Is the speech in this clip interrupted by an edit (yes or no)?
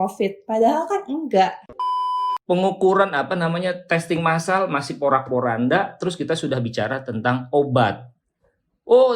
yes